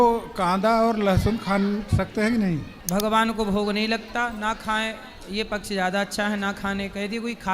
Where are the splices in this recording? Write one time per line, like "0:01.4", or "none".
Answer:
0:02.7